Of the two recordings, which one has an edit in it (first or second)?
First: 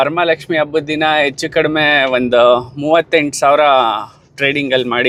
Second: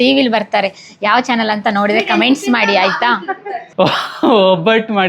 second